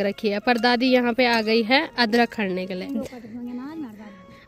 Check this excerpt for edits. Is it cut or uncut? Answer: cut